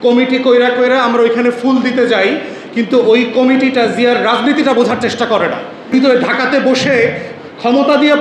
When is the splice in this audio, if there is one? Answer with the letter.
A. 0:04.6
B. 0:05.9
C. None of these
B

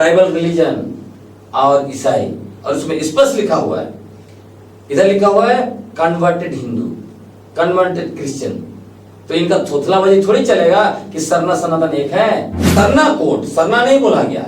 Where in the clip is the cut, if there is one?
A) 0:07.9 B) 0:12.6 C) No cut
B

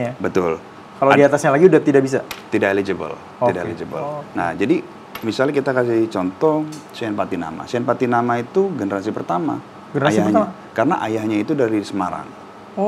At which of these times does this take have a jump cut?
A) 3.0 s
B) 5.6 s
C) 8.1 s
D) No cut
D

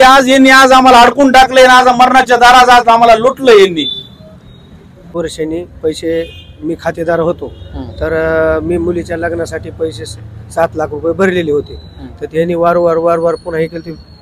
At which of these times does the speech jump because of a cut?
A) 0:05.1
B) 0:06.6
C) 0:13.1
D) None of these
A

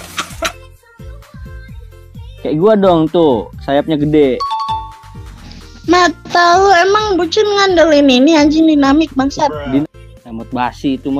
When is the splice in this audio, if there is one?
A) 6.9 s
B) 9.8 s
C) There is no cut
B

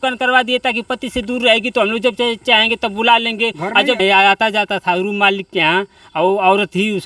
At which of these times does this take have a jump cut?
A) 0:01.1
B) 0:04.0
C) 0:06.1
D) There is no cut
B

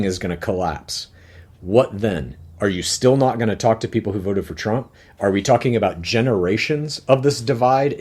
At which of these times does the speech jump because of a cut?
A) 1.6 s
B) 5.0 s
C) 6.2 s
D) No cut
D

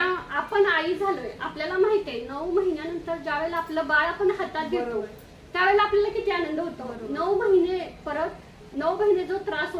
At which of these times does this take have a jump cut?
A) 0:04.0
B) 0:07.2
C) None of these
C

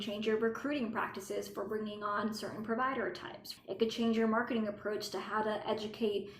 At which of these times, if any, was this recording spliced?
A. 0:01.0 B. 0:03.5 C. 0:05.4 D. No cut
B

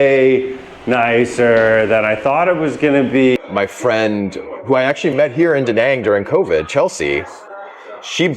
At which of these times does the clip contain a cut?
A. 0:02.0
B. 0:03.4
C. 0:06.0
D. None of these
B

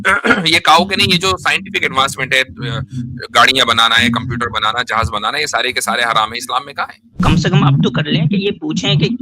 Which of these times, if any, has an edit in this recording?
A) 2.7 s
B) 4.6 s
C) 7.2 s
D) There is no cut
C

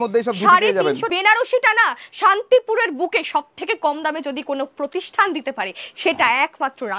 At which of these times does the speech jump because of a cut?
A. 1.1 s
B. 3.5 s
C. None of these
A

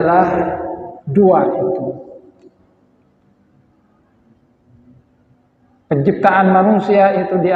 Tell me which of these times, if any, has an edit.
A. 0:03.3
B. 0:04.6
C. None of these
C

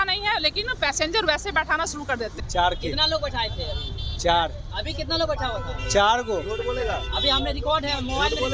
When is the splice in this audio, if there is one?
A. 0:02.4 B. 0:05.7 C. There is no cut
A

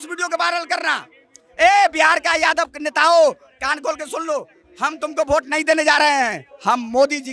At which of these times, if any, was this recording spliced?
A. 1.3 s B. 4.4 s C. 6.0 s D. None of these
D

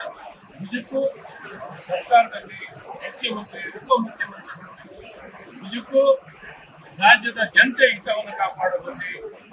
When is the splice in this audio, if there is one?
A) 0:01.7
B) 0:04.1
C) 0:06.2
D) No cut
B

